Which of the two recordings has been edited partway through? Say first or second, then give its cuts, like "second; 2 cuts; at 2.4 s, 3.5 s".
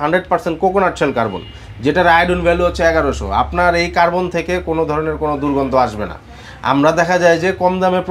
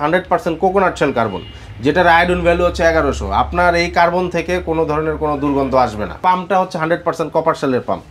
second; 1 cut; at 6.1 s